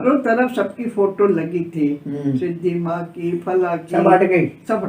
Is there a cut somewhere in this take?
no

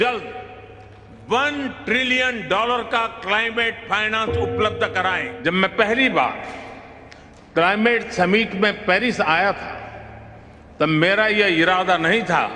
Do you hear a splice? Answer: yes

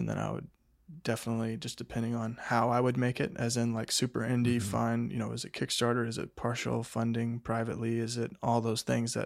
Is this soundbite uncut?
yes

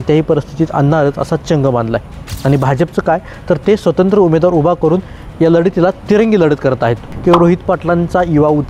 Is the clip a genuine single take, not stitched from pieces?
no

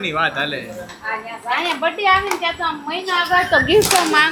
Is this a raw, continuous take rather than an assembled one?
yes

